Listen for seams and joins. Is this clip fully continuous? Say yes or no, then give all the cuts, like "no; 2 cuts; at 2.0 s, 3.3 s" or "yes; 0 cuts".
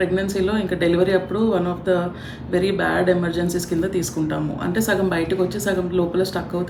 yes; 0 cuts